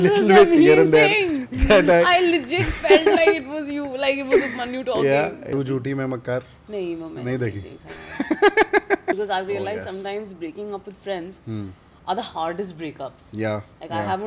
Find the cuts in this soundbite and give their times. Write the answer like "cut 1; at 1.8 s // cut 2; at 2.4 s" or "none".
cut 1; at 5.4 s // cut 2; at 9.2 s